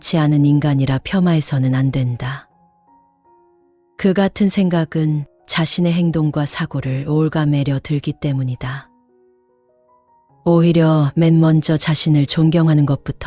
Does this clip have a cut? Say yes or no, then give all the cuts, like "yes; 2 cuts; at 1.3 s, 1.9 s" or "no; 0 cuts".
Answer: no; 0 cuts